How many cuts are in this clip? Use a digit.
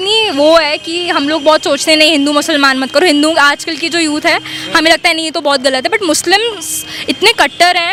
0